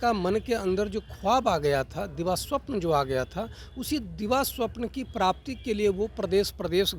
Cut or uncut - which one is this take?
uncut